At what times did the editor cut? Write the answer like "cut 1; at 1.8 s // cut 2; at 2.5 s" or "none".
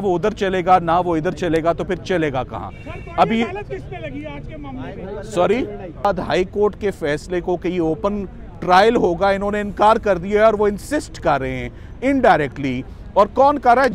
cut 1; at 6.0 s